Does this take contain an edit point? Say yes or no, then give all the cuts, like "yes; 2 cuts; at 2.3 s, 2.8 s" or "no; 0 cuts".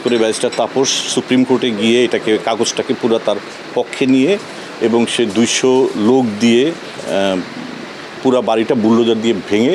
no; 0 cuts